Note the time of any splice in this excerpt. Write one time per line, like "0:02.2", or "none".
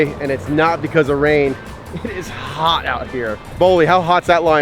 0:03.5

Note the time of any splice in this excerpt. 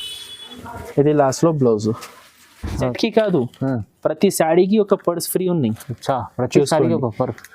0:02.9

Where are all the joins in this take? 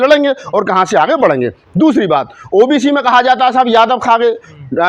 none

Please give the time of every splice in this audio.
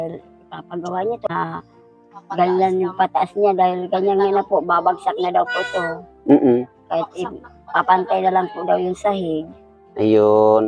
0:01.3

